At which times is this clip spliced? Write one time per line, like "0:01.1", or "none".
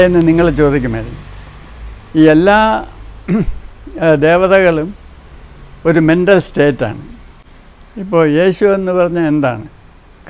none

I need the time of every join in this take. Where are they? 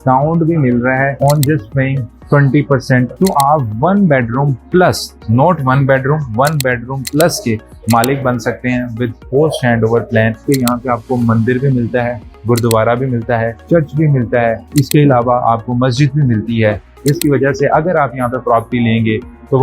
0:03.1
0:10.4

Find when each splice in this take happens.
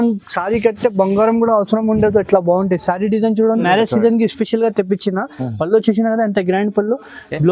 0:03.6

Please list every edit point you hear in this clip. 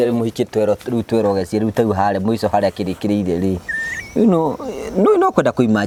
none

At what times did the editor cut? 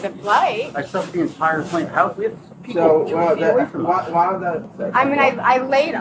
0:04.7

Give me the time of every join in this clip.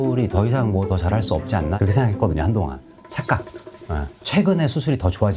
none

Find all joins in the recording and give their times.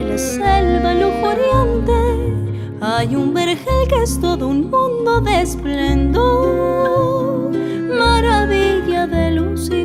none

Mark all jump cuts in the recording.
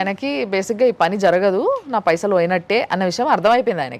none

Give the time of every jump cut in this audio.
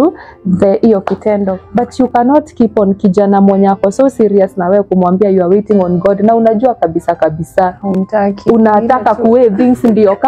0:01.6

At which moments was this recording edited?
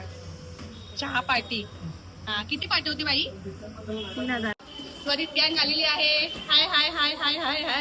0:04.5

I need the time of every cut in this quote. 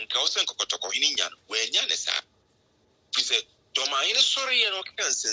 none

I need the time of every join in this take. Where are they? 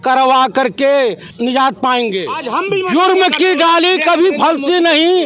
0:01.3
0:02.4

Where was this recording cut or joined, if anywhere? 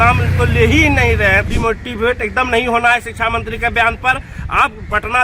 0:01.5

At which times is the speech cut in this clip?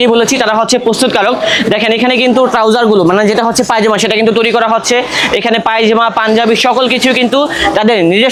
none

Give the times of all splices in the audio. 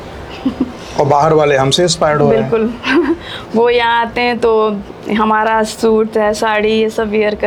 none

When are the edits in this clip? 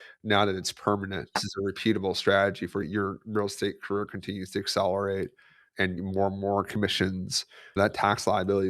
0:01.5
0:02.8
0:06.0
0:07.8

